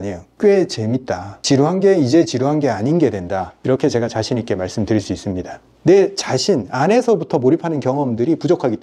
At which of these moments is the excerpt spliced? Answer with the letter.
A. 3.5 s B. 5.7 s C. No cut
B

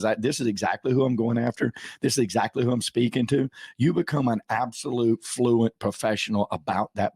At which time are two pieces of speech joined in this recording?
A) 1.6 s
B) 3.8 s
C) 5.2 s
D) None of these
D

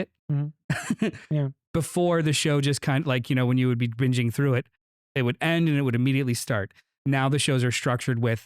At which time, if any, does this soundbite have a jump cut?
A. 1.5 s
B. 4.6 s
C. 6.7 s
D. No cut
A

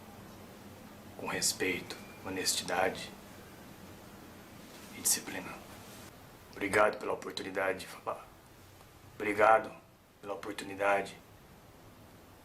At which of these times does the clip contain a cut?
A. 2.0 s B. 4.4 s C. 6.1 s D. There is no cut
C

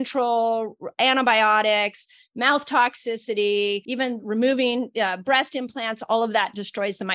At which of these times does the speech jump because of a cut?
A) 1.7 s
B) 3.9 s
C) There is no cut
B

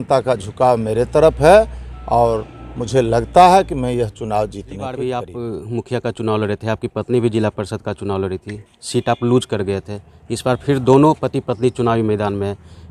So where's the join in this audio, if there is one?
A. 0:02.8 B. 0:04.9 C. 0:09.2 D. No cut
B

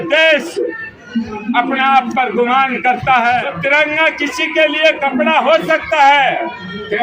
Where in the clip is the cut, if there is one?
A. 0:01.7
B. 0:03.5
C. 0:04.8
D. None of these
B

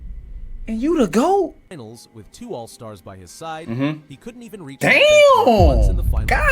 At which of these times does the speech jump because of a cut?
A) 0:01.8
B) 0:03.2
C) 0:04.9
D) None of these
A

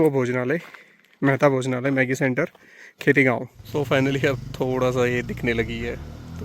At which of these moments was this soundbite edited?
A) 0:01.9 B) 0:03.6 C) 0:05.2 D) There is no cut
B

